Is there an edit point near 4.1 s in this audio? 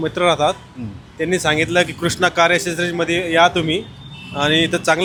no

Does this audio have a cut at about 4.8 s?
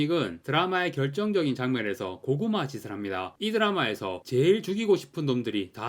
no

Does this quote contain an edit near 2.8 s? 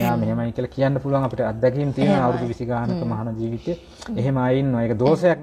no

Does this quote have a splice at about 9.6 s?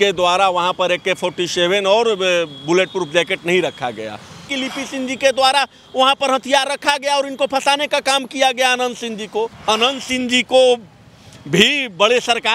yes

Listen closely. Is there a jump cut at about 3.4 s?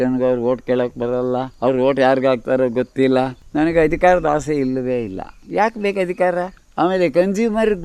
yes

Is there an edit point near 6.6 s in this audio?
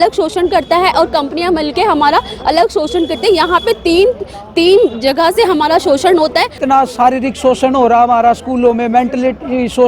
yes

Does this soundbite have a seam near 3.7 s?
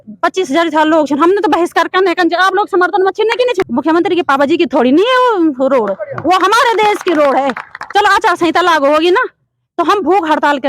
yes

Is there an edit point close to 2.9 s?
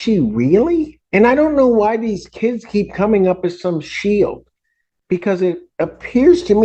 no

